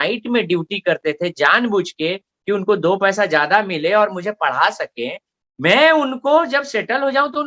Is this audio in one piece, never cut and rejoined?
yes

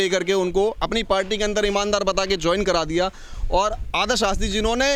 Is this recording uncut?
yes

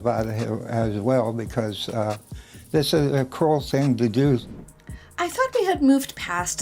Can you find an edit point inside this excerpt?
yes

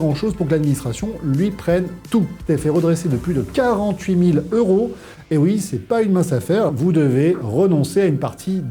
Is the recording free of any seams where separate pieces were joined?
no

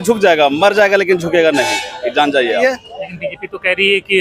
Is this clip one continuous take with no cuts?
no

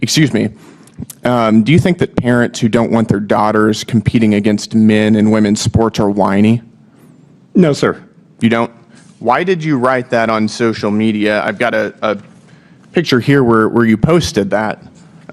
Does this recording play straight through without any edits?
yes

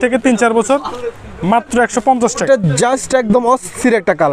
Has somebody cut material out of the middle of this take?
yes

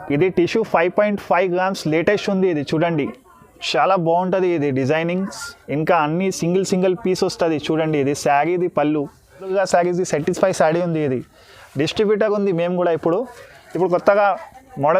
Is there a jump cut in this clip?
yes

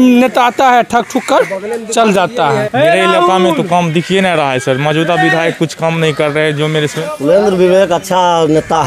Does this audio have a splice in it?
yes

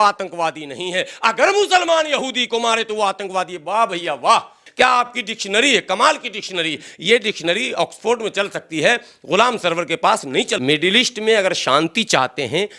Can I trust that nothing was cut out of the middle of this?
no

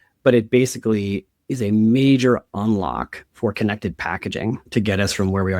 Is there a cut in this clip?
yes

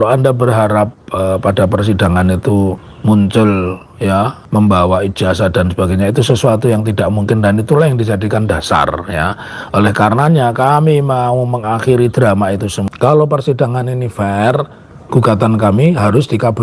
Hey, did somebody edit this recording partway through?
yes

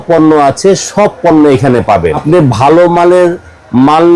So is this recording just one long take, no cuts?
no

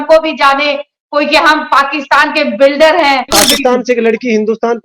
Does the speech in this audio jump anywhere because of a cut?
yes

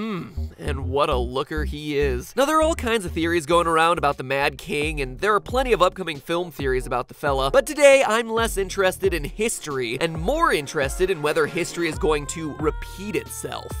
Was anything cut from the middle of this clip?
yes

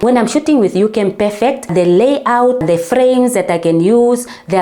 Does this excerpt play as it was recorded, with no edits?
yes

